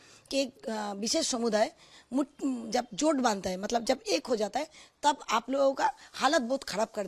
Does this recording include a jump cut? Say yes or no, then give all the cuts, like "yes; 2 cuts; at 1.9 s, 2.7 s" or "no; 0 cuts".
no; 0 cuts